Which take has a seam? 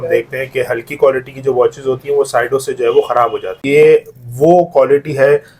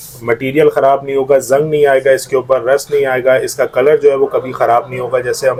first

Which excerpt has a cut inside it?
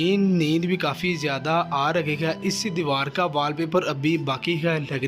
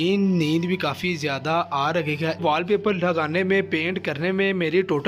second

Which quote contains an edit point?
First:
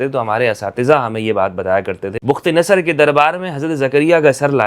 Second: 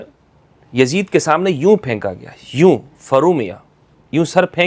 first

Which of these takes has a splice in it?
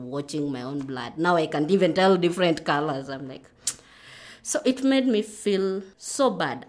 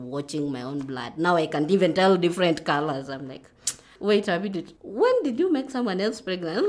second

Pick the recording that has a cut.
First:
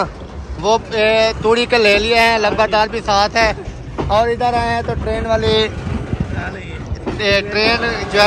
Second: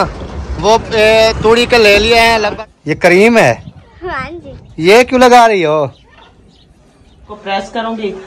second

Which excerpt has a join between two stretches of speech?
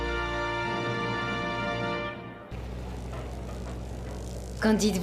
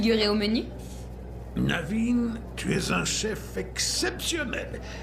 first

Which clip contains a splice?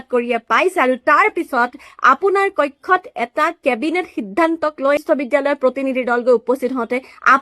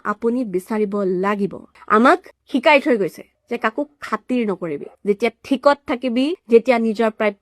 second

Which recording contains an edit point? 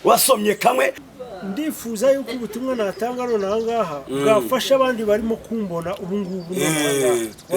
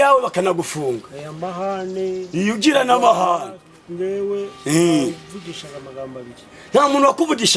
first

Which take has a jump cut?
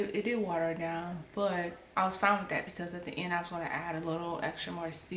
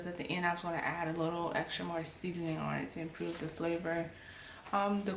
first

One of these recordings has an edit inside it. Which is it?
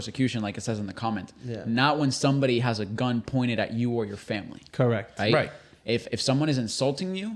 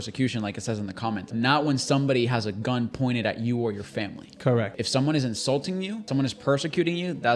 second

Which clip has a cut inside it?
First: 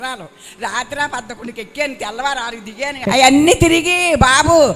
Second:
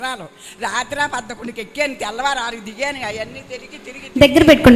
first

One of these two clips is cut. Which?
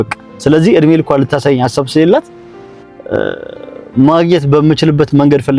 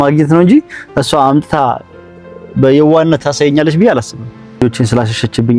second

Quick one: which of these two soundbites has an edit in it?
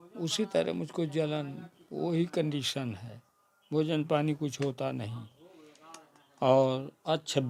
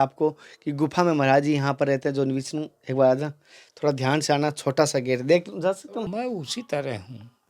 second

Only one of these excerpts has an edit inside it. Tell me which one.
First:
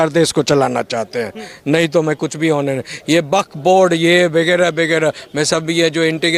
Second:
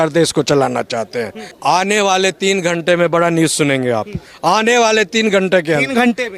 second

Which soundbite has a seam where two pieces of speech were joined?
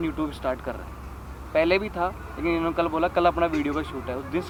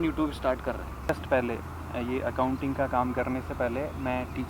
second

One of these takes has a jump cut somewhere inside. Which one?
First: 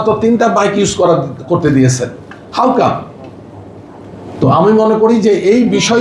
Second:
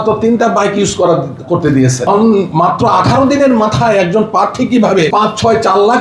second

